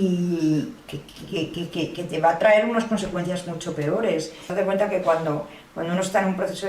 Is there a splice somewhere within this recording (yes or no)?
yes